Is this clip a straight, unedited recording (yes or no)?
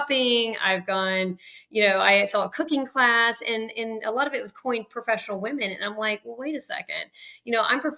yes